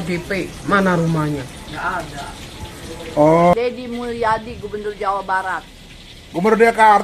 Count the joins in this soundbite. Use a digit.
1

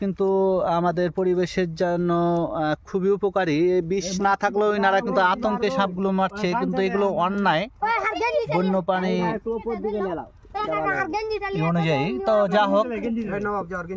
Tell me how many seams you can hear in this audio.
0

